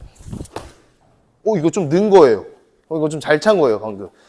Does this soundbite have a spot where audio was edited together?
no; 0 cuts

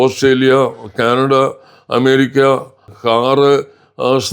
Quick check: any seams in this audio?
yes; 1 cut; at 2.9 s

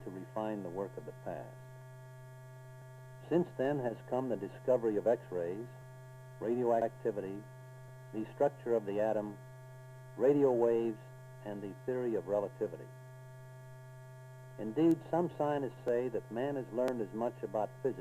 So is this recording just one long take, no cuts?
no; 1 cut; at 6.8 s

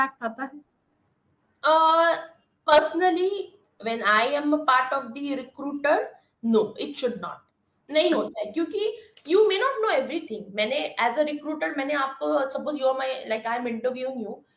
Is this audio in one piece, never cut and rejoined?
yes; 0 cuts

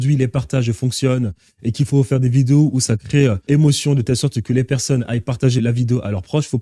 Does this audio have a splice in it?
yes; 2 cuts; at 3.5 s, 5.6 s

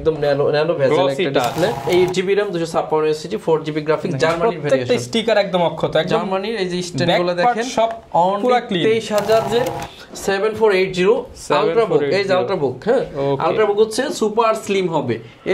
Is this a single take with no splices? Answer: no; 2 cuts; at 1.8 s, 9.5 s

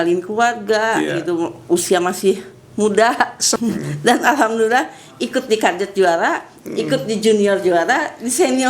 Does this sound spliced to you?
yes; 1 cut; at 3.4 s

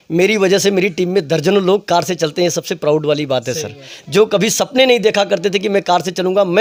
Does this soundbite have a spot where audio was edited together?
no; 0 cuts

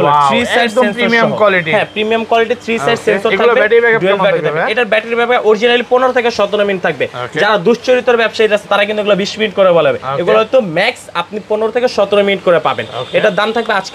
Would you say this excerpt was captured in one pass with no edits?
yes; 0 cuts

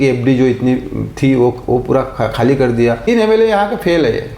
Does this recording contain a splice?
yes; 1 cut; at 3.1 s

